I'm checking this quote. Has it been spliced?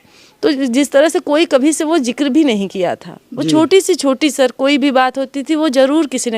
no; 0 cuts

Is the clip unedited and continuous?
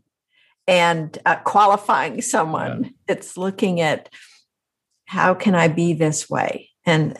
yes; 0 cuts

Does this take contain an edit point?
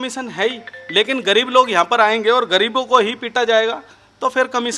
no; 0 cuts

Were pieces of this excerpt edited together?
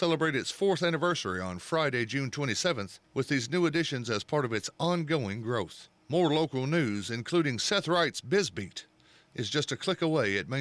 no; 0 cuts

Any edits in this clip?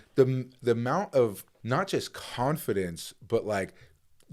yes; 1 cut; at 1.5 s

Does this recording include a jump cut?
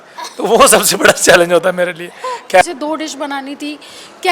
yes; 1 cut; at 2.6 s

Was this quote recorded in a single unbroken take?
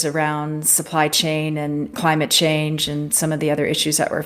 no; 1 cut; at 1.9 s

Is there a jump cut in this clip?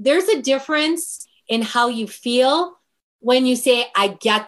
no; 0 cuts

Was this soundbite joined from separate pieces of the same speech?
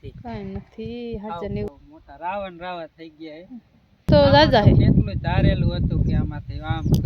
yes; 2 cuts; at 1.7 s, 4.1 s

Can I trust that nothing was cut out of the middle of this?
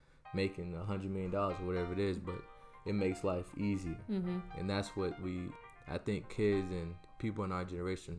no; 2 cuts; at 5.6 s, 7.0 s

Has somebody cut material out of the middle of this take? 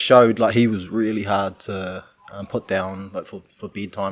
no; 0 cuts

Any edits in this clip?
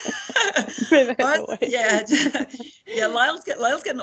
no; 0 cuts

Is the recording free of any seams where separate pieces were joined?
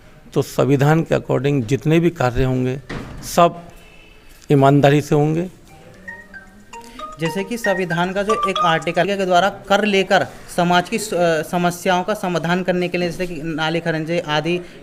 yes; 0 cuts

